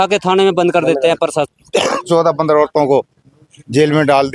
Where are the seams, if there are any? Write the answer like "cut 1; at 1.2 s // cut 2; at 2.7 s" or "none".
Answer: cut 1; at 1.5 s

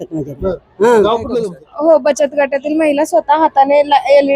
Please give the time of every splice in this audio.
cut 1; at 1.3 s

